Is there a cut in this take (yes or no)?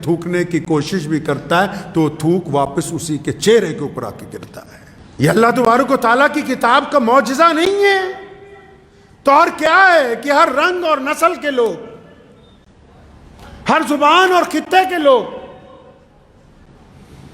no